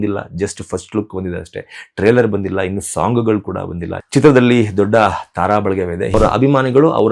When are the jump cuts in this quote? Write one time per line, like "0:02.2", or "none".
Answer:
0:06.1